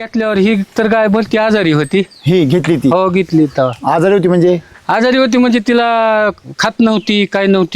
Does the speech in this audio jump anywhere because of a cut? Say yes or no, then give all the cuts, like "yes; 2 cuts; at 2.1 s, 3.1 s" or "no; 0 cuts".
no; 0 cuts